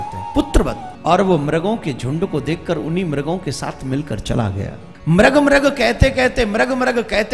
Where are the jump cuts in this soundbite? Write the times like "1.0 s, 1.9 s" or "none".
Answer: 0.9 s, 4.9 s